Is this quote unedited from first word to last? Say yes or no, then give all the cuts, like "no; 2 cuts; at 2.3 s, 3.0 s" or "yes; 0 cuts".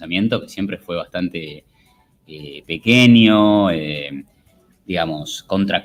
yes; 0 cuts